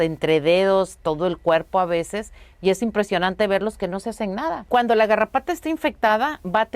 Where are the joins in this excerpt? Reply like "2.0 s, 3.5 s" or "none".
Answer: 4.6 s